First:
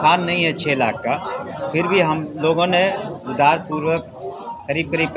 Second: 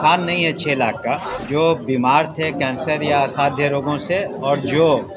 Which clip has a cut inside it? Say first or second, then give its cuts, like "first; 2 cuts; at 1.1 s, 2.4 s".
second; 1 cut; at 1.3 s